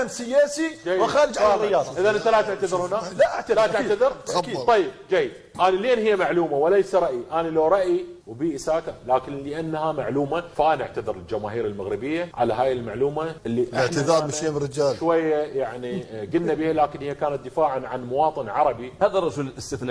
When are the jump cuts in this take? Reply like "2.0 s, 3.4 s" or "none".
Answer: 18.9 s